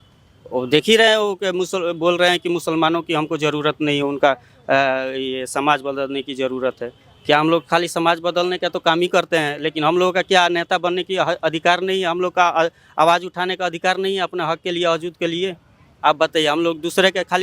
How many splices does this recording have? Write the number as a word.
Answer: zero